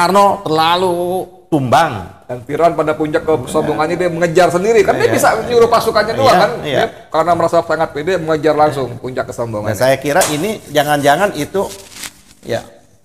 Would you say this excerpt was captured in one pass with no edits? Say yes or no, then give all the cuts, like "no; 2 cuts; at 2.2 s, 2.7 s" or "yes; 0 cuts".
yes; 0 cuts